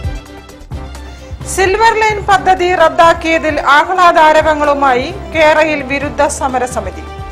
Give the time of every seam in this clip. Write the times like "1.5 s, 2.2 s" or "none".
1.0 s